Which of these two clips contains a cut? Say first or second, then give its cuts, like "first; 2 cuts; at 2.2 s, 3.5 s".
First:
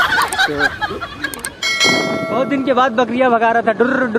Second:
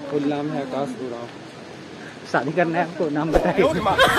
first; 1 cut; at 1.8 s